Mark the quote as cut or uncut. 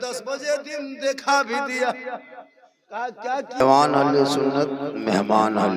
cut